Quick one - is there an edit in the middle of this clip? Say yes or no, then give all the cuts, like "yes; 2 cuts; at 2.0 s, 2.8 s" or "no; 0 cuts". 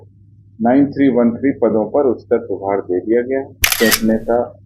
yes; 1 cut; at 3.6 s